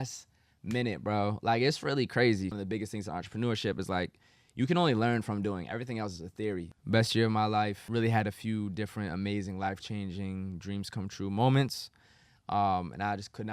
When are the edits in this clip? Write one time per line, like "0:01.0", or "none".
0:02.5
0:06.7
0:07.8